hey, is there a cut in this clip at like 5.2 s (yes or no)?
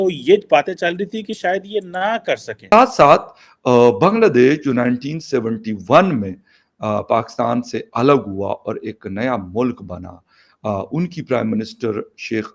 no